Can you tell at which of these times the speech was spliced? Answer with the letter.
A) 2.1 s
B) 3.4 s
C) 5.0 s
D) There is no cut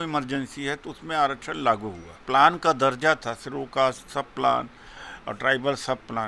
A